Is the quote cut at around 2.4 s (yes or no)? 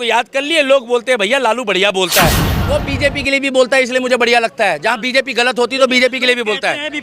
yes